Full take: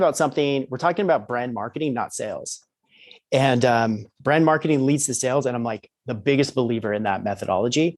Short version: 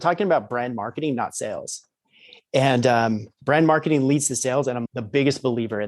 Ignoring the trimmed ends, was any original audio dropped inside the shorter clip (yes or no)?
yes